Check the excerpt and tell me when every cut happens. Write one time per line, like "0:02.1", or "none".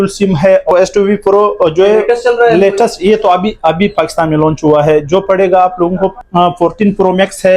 0:00.7
0:06.2